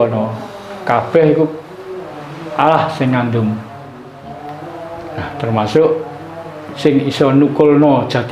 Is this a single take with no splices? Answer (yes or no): no